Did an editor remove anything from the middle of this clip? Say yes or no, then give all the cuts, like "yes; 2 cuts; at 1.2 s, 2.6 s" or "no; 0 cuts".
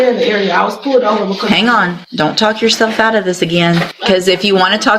yes; 2 cuts; at 2.0 s, 3.9 s